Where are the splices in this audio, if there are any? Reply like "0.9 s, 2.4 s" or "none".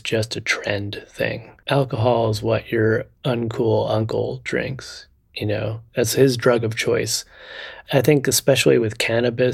1.5 s, 7.8 s